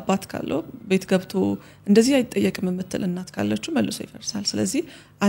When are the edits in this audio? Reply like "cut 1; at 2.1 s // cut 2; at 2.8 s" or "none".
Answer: none